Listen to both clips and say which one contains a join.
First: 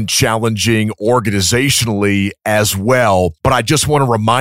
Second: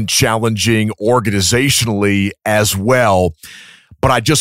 first; 1 cut; at 3.4 s

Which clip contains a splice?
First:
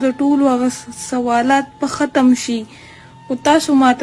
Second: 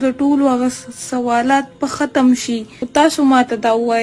second; 1 cut; at 2.7 s

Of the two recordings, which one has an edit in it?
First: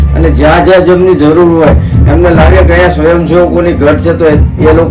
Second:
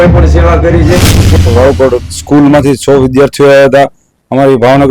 second; 1 cut; at 1.4 s

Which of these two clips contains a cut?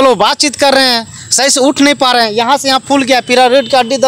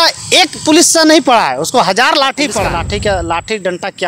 second; 1 cut; at 2.9 s

